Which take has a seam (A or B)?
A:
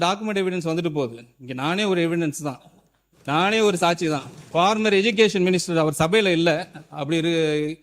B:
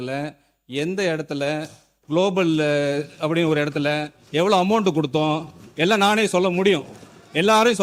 A